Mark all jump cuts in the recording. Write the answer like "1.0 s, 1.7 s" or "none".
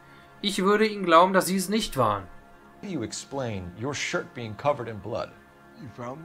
2.9 s